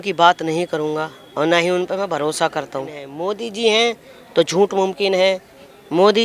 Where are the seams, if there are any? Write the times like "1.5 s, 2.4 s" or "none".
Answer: 3.1 s